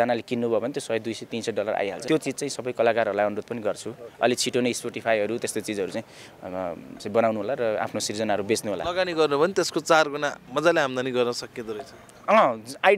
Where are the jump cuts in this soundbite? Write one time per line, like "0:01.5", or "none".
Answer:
0:02.0
0:08.8